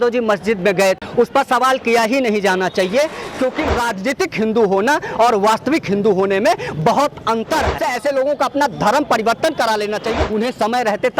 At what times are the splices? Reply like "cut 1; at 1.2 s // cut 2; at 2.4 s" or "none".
cut 1; at 1.0 s // cut 2; at 3.7 s // cut 3; at 7.8 s // cut 4; at 10.1 s